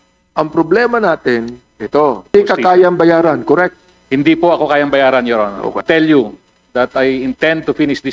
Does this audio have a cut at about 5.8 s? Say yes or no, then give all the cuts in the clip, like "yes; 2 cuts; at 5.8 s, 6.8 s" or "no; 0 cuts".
yes; 2 cuts; at 2.3 s, 5.8 s